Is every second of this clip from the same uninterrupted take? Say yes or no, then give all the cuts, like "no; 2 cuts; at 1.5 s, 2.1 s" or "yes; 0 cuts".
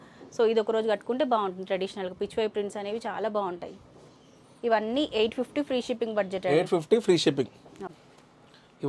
yes; 0 cuts